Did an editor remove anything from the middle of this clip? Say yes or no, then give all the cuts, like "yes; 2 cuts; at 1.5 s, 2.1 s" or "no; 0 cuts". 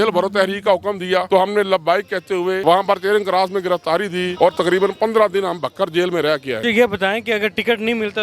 yes; 4 cuts; at 1.3 s, 2.6 s, 4.3 s, 6.6 s